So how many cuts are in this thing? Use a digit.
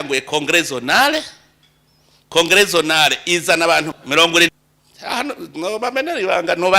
1